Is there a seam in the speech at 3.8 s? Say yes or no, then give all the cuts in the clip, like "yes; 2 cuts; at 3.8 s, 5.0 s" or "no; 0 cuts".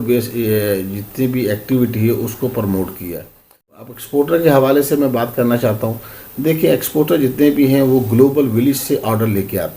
yes; 1 cut; at 3.8 s